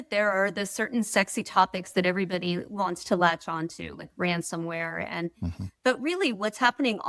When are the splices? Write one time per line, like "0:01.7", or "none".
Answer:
none